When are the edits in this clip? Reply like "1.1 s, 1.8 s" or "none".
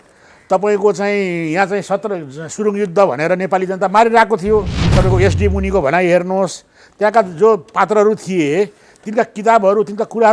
4.8 s